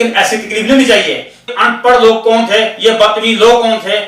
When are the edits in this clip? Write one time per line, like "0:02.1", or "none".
0:01.5